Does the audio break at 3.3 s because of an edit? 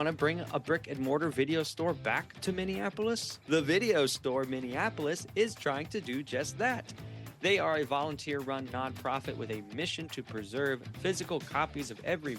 yes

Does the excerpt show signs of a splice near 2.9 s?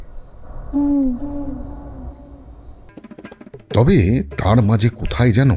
yes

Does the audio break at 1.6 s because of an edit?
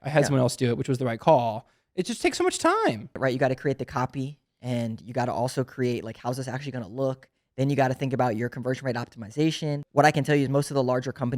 no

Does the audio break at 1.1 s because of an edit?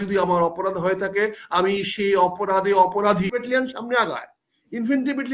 no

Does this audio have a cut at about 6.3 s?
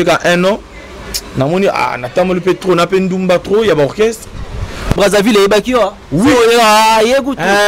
no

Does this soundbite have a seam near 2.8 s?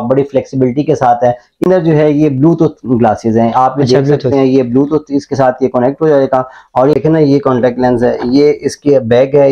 no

